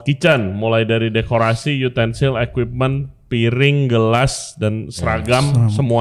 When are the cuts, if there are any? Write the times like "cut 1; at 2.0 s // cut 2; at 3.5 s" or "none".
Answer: none